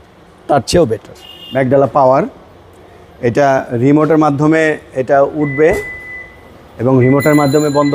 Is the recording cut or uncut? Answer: cut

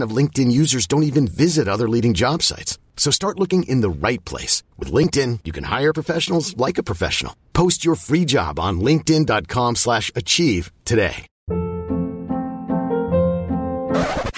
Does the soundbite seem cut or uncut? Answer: cut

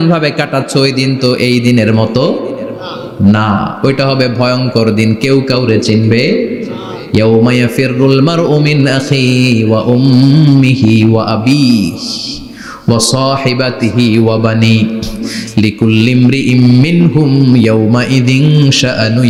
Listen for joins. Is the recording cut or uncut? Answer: uncut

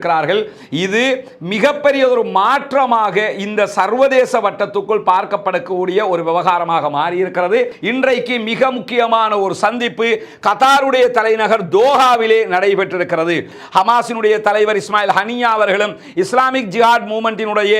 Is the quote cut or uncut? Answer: cut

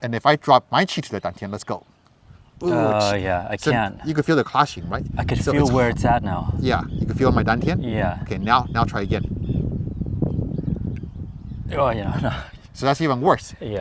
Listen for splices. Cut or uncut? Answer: uncut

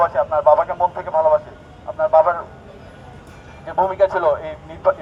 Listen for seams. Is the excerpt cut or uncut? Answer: uncut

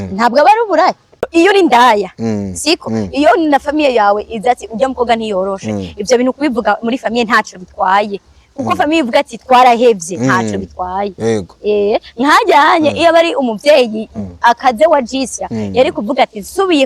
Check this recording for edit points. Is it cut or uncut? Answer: cut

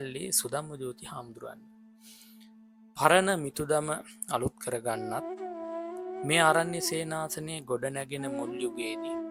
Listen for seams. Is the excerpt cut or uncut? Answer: uncut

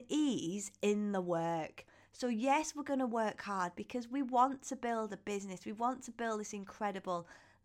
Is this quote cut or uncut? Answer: uncut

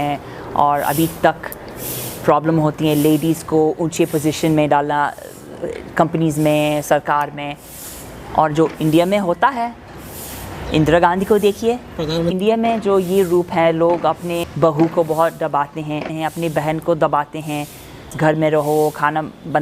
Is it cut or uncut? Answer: cut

